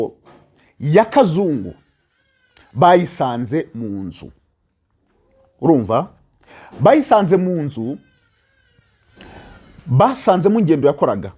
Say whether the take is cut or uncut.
uncut